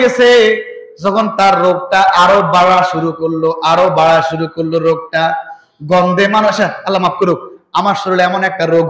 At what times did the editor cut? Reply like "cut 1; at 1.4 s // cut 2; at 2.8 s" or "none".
none

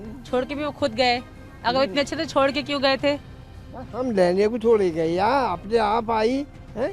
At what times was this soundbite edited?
none

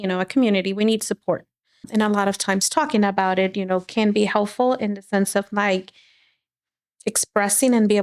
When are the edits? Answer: cut 1; at 1.8 s

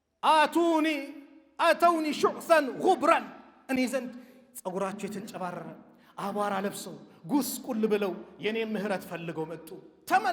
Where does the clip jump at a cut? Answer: none

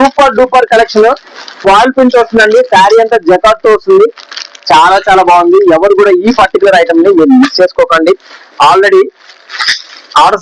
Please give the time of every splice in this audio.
none

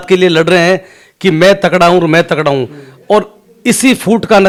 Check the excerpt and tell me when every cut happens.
none

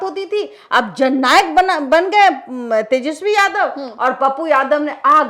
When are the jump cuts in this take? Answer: none

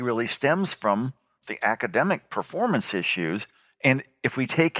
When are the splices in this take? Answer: none

